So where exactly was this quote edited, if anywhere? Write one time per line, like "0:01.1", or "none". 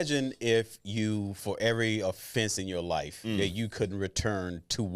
none